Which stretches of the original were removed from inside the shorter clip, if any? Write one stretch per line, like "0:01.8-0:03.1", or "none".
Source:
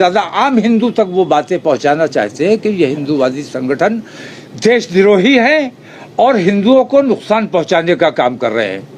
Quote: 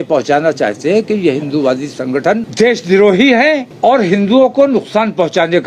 0:04.0-0:04.5
0:05.7-0:06.0